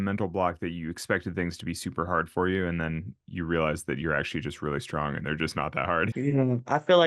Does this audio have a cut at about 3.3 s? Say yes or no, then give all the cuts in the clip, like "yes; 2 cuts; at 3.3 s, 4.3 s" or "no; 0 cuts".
no; 1 cut; at 6.1 s